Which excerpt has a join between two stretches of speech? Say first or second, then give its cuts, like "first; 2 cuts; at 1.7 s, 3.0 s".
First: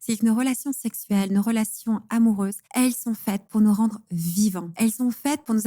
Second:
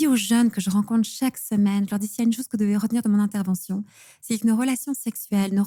first; 2 cuts; at 2.6 s, 4.7 s